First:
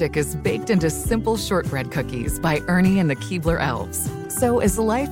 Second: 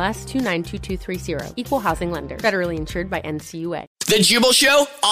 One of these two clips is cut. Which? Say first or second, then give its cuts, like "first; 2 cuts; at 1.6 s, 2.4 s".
second; 1 cut; at 4.0 s